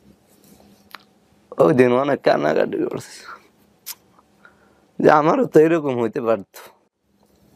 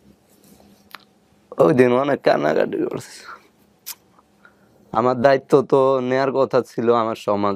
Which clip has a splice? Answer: second; 1 cut; at 4.6 s

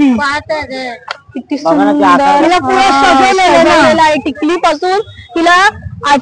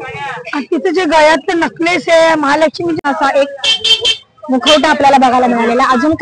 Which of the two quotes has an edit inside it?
second; 1 cut; at 3.0 s

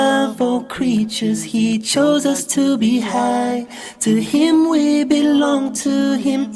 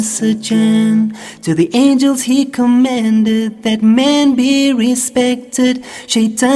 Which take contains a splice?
first; 1 cut; at 3.3 s

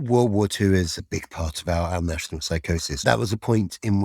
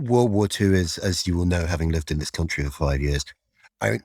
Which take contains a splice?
first; 2 cuts; at 0.9 s, 3.0 s

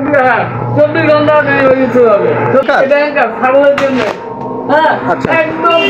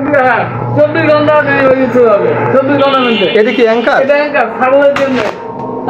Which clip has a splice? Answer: first; 1 cut; at 2.6 s

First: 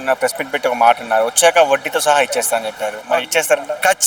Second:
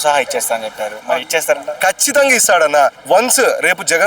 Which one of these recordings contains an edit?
second; 1 cut; at 3.0 s

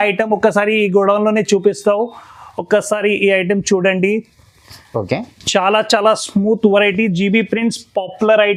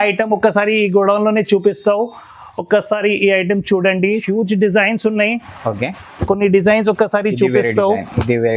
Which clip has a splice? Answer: second; 1 cut; at 4.2 s

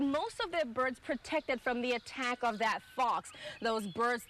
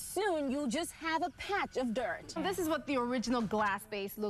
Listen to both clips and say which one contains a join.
second; 1 cut; at 2.4 s

